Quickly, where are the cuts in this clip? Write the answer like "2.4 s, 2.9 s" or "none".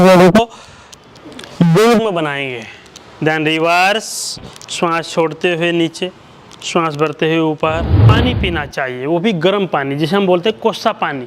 8.1 s